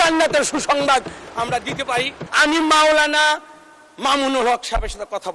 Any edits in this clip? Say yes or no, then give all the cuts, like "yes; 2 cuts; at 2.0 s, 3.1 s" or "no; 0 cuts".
yes; 1 cut; at 2.2 s